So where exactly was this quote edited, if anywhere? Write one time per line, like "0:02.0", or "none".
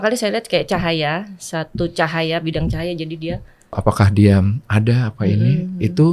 0:03.8